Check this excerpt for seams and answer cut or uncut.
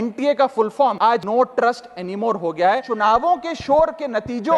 cut